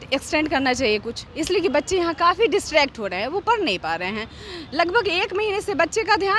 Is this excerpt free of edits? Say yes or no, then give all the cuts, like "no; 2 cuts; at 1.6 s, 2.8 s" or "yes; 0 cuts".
yes; 0 cuts